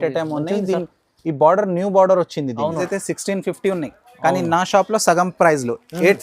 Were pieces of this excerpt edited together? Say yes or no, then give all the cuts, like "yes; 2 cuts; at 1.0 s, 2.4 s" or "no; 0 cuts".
yes; 1 cut; at 2.8 s